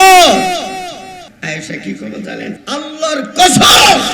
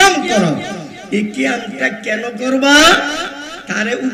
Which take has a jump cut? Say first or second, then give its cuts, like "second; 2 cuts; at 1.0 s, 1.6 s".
first; 2 cuts; at 1.3 s, 2.6 s